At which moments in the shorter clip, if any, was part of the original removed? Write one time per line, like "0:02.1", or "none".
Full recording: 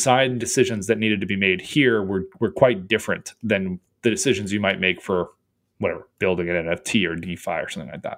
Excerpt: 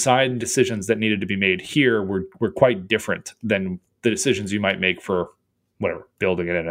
none